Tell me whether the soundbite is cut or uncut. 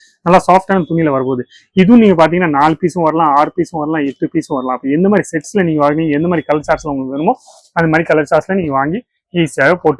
uncut